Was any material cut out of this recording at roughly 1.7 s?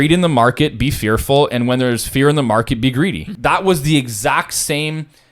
no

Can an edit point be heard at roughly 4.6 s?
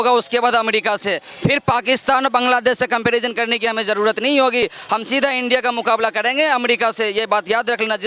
no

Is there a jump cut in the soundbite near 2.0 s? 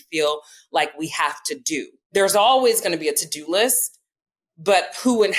yes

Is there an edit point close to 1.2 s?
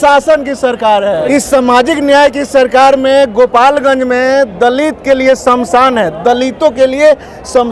yes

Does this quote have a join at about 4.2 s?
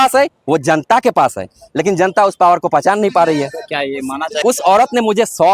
yes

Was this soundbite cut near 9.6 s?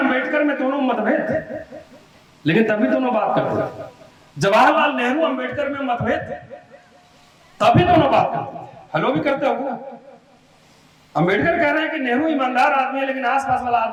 no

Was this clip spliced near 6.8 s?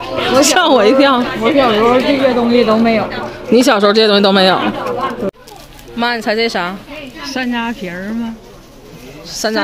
no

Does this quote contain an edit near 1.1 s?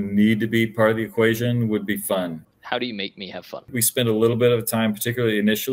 no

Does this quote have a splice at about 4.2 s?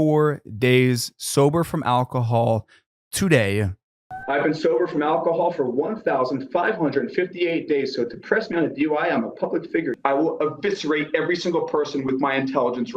yes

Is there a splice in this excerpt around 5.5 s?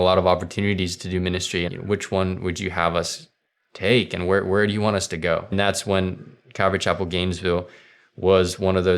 yes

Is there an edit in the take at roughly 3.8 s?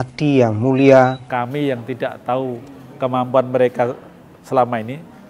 no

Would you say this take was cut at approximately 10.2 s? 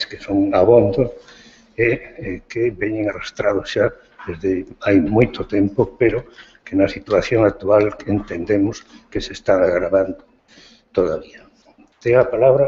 yes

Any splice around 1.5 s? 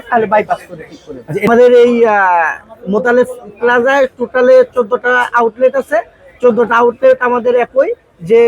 yes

